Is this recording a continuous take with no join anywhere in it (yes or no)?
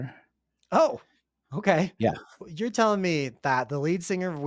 no